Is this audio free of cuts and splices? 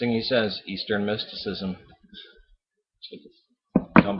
yes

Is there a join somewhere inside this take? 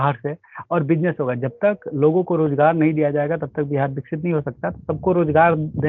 no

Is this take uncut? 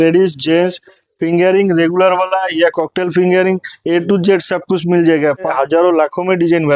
no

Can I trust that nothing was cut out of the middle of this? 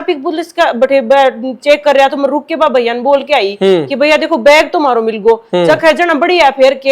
yes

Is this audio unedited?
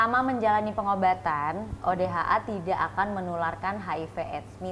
yes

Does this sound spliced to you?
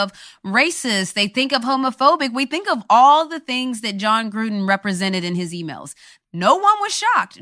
yes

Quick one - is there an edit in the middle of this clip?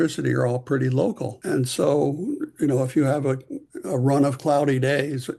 no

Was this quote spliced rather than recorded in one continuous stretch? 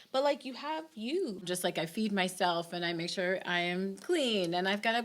yes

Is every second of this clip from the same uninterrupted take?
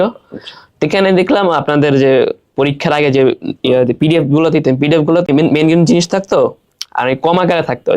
no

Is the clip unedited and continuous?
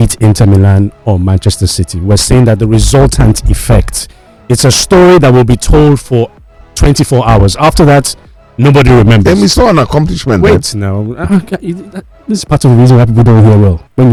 yes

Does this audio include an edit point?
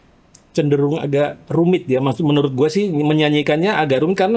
no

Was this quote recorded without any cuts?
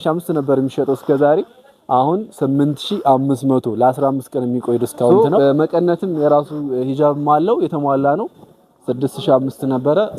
no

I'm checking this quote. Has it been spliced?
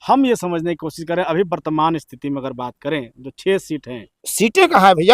yes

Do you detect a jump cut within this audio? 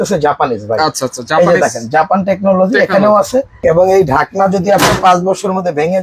yes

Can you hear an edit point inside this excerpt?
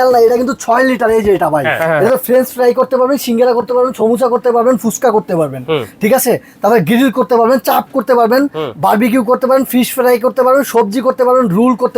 yes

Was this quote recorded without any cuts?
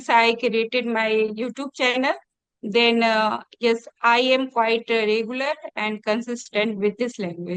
yes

